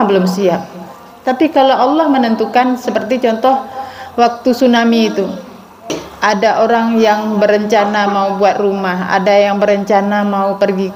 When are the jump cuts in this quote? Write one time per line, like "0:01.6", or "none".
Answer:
0:05.9